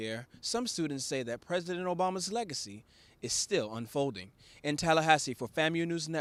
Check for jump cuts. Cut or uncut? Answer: uncut